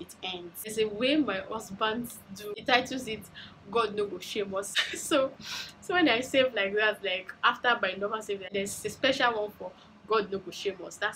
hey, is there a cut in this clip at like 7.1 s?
no; 4 cuts; at 0.7 s, 2.6 s, 4.7 s, 8.5 s

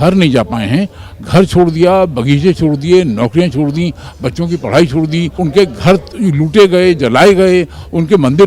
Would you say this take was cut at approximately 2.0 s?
no; 1 cut; at 5.3 s

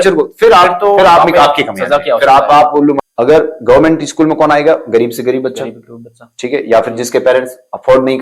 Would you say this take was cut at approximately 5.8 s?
no; 1 cut; at 3.0 s

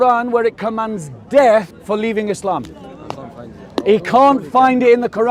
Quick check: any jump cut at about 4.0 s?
no; 1 cut; at 1.7 s

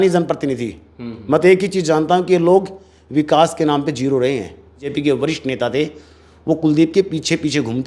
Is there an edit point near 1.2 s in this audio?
no; 1 cut; at 4.9 s

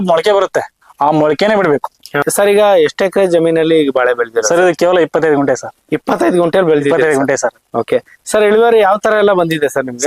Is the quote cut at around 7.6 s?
no; 1 cut; at 2.2 s

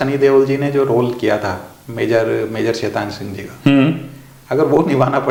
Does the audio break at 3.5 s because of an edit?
no; 0 cuts

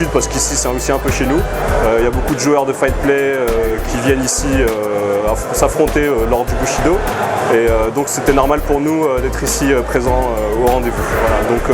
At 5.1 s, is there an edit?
yes; 1 cut; at 5.1 s

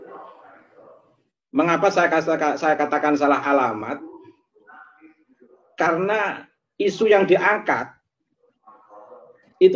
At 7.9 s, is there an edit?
no; 0 cuts

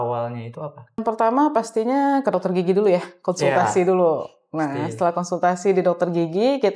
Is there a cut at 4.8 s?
no; 1 cut; at 1.0 s

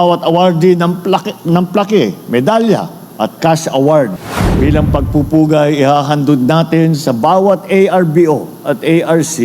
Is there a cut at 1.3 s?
no; 1 cut; at 4.2 s

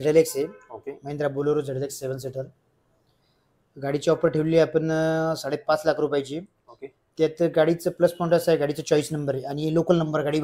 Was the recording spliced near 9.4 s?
no; 0 cuts

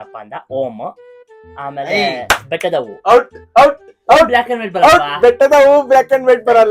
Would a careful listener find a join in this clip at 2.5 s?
no; 1 cut; at 5.3 s

